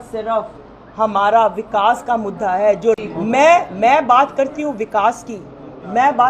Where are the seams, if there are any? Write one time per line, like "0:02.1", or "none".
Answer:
0:03.0

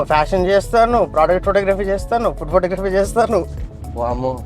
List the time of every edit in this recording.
none

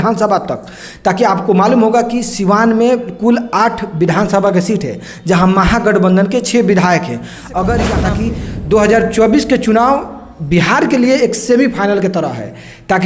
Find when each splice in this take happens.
0:08.1

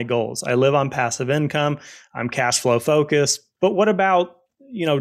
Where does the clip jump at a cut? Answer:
0:03.4

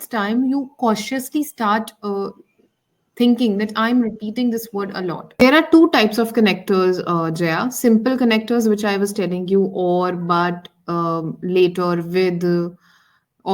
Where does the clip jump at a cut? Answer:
0:05.4

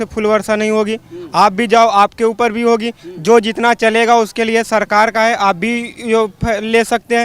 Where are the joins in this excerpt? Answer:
none

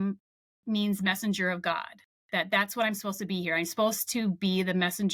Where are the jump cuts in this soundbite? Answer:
none

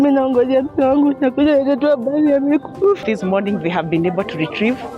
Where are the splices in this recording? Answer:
0:03.0

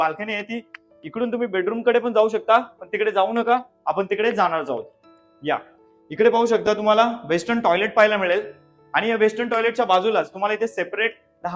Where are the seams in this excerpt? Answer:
none

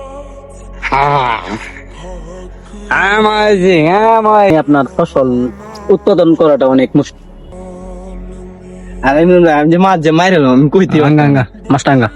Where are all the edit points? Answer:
0:04.5
0:07.5

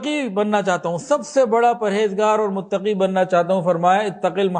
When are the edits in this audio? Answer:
none

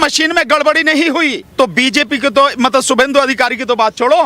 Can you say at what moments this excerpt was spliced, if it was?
0:01.4

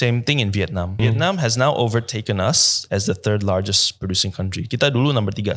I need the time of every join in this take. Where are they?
0:01.0

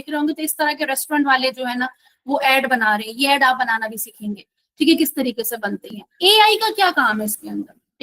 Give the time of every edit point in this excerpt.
0:06.0

